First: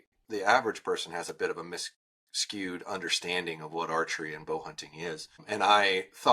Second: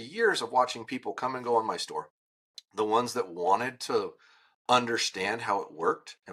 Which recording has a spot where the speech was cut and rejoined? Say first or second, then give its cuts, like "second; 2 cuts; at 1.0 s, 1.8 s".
first; 1 cut; at 5.4 s